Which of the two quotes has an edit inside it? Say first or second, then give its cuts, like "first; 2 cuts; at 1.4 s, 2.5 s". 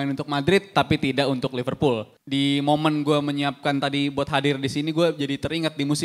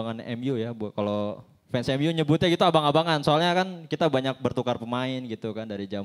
first; 1 cut; at 2.1 s